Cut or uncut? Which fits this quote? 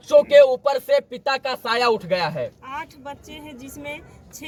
uncut